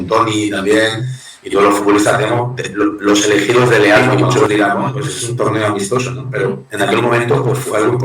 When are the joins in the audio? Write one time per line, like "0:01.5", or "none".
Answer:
0:04.5